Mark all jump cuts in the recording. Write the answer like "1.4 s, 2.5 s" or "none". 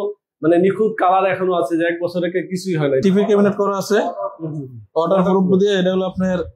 3.0 s